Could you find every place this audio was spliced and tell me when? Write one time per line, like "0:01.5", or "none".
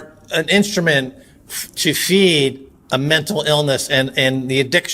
none